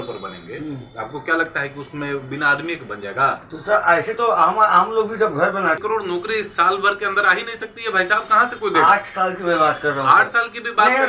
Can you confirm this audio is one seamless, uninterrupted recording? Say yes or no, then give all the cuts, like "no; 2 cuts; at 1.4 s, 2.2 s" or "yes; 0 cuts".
no; 1 cut; at 5.8 s